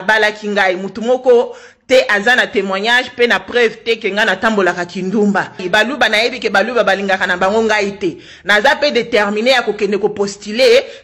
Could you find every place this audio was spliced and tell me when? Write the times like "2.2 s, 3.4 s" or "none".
5.6 s